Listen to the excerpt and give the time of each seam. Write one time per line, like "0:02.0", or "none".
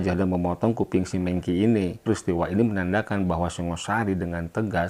0:02.0